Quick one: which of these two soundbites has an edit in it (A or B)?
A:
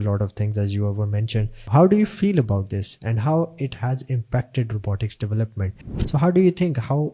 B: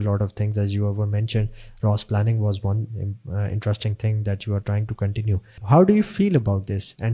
A